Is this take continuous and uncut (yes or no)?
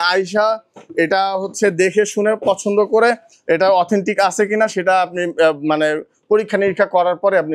yes